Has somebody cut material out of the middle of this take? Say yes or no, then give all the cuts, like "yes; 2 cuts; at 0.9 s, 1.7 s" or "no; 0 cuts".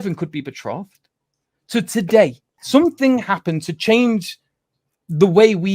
yes; 1 cut; at 2.6 s